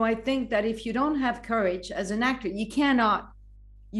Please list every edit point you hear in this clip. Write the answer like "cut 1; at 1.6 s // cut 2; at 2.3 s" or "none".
none